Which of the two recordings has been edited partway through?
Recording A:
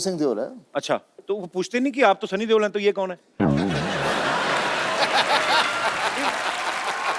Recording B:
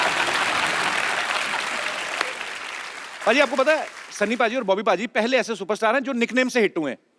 B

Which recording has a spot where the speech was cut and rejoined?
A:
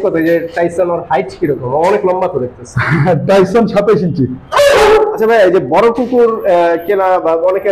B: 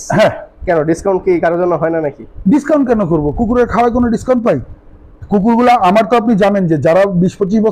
A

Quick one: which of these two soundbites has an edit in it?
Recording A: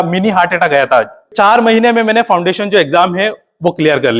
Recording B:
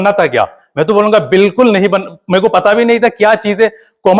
A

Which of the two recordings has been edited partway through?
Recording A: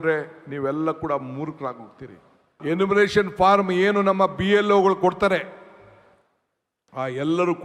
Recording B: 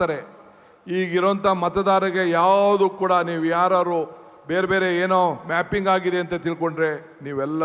A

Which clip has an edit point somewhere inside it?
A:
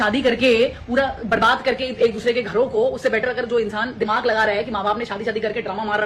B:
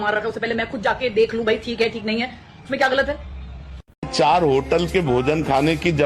B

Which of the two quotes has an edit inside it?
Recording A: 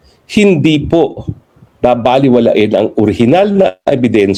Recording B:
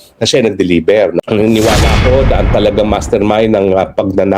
B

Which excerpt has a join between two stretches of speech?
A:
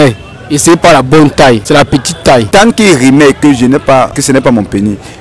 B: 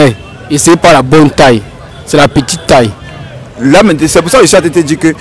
A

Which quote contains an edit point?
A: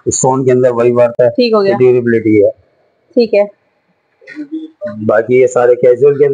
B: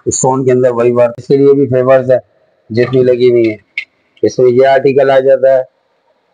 B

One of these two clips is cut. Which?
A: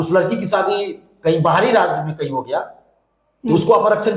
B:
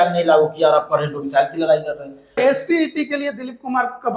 B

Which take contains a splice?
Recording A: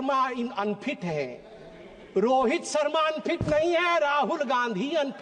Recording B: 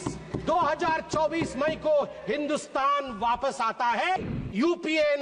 B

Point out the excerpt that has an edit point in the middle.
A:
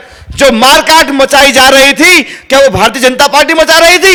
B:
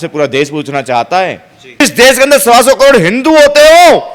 B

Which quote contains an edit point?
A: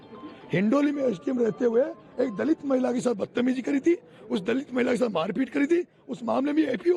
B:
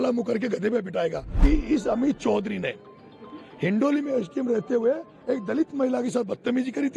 B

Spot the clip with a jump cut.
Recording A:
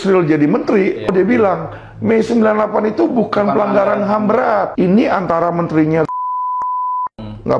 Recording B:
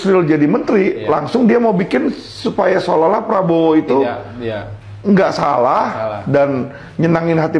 A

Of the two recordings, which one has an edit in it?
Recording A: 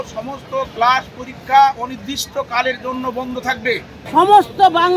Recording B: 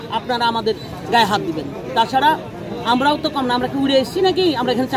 A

